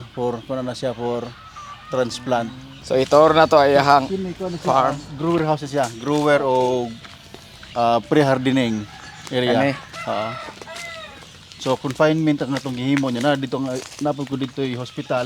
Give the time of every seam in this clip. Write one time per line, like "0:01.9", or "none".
0:02.7